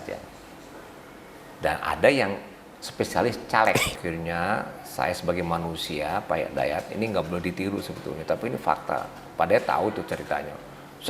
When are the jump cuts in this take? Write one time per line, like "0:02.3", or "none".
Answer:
0:04.0